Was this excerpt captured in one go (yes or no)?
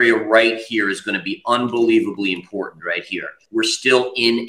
no